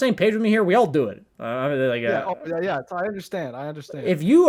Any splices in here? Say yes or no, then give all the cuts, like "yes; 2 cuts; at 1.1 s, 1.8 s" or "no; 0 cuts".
no; 0 cuts